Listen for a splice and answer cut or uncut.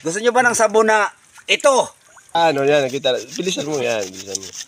cut